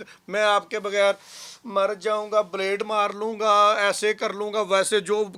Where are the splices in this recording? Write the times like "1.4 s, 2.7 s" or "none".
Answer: none